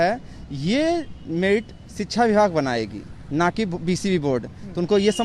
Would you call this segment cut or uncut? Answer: uncut